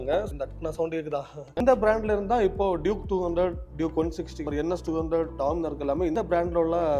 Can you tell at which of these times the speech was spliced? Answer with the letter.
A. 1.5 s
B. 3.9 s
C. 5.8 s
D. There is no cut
A